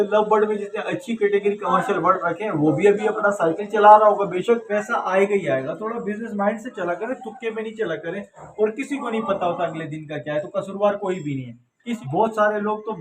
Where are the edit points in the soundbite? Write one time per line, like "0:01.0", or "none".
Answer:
0:04.7
0:12.0